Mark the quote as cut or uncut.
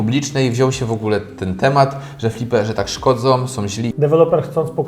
cut